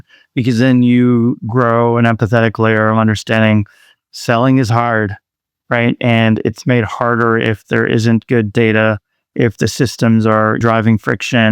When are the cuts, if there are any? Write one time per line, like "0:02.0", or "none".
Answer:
0:10.6